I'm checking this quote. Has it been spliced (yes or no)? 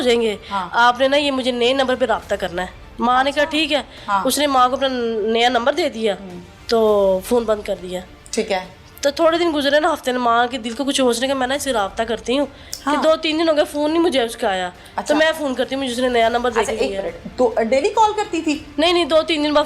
no